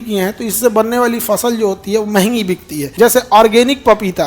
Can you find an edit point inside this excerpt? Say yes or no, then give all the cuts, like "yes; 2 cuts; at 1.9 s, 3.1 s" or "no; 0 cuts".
yes; 1 cut; at 2.8 s